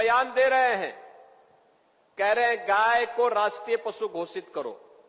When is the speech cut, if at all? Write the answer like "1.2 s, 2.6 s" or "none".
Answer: none